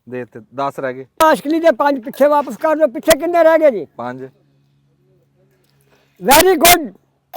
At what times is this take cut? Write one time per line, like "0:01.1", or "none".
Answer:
0:01.2